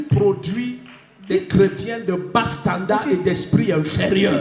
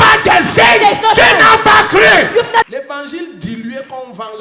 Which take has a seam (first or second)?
second